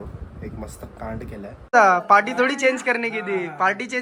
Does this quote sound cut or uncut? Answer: cut